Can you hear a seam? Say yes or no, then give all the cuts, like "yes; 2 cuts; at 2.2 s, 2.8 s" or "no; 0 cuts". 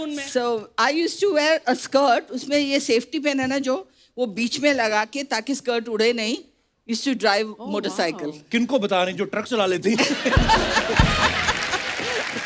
no; 0 cuts